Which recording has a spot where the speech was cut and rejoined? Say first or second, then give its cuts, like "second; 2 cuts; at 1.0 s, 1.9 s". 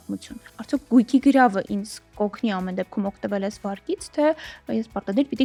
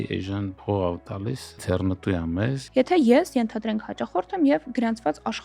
second; 2 cuts; at 1.6 s, 2.6 s